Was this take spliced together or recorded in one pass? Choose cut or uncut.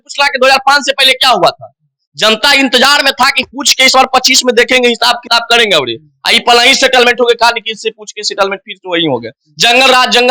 uncut